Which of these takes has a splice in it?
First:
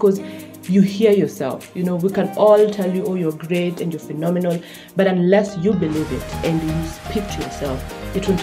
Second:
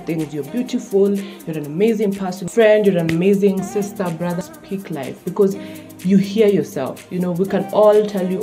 second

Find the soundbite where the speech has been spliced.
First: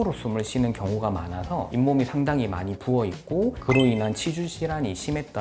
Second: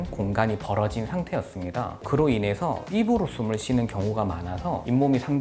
second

